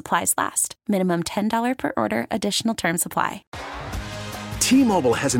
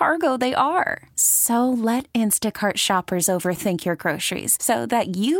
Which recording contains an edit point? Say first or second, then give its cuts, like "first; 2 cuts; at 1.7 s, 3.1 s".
first; 1 cut; at 3.5 s